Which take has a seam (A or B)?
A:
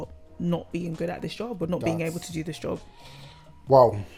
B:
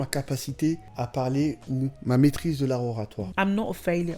B